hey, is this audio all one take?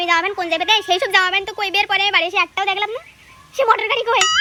yes; 0 cuts

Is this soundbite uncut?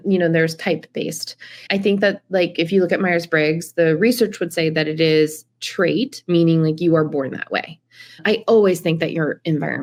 yes; 0 cuts

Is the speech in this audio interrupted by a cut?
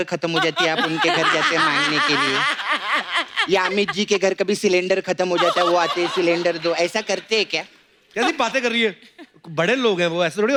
no; 0 cuts

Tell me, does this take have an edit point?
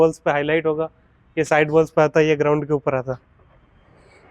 no; 0 cuts

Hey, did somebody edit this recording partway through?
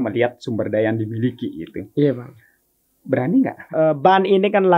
yes; 1 cut; at 3.6 s

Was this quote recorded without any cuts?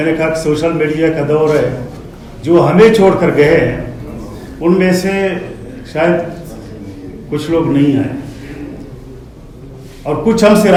yes; 0 cuts

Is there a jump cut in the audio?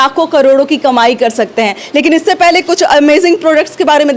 no; 0 cuts

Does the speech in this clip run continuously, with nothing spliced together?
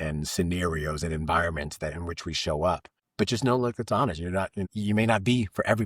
no; 2 cuts; at 3.0 s, 4.7 s

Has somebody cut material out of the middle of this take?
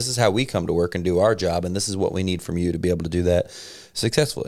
no; 0 cuts

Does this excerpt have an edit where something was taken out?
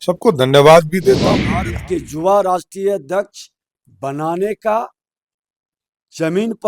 yes; 1 cut; at 1.5 s

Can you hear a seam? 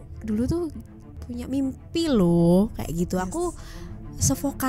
yes; 1 cut; at 1.2 s

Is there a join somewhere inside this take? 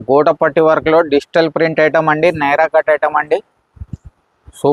no; 0 cuts

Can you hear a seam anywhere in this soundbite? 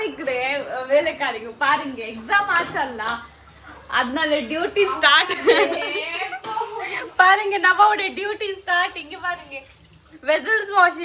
no; 0 cuts

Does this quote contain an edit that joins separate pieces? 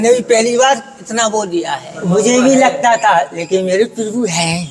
yes; 1 cut; at 1.9 s

